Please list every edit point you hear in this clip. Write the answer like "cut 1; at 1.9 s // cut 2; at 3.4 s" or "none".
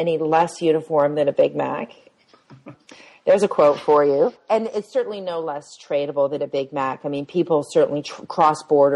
none

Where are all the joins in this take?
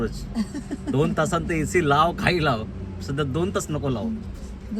none

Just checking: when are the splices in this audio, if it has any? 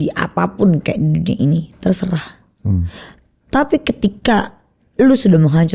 none

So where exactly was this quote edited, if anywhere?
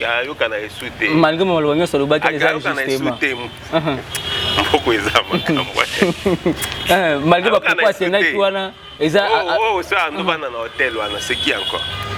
none

